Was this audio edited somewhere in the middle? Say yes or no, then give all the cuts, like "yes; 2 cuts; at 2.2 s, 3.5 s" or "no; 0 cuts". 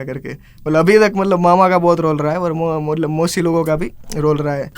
no; 0 cuts